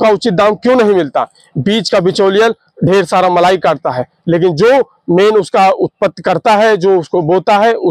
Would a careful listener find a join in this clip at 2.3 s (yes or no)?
no